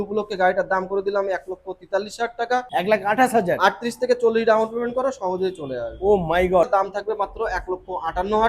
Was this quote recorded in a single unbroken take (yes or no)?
no